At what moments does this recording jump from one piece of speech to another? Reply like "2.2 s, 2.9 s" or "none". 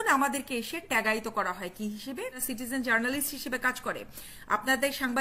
2.4 s